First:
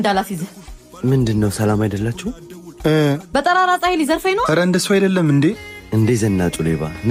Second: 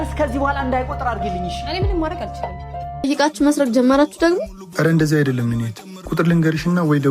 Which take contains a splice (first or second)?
second